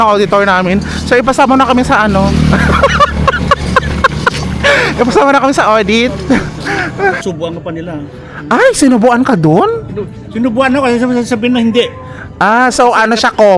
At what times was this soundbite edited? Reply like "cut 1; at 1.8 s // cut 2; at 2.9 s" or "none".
cut 1; at 7.2 s